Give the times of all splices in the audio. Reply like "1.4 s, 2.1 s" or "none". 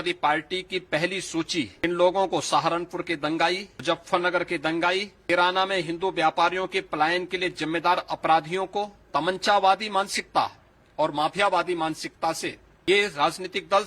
1.8 s, 3.7 s, 5.3 s, 9.0 s, 12.7 s